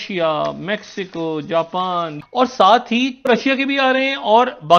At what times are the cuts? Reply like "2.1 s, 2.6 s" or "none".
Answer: 2.1 s, 3.3 s